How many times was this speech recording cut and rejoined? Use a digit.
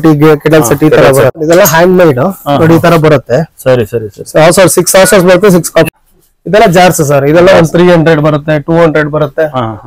2